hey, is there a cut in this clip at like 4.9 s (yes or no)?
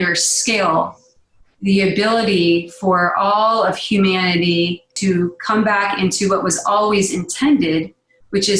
yes